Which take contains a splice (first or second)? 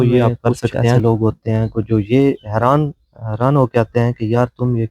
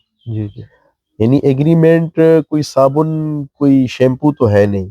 first